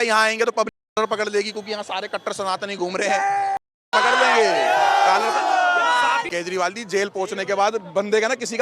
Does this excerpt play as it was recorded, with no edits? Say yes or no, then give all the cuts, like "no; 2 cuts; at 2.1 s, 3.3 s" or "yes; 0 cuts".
no; 1 cut; at 6.3 s